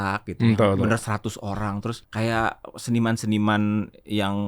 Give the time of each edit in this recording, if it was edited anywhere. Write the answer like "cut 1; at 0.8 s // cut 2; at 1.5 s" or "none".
cut 1; at 2.0 s